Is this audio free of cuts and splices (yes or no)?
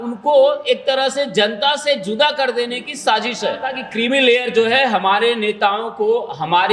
no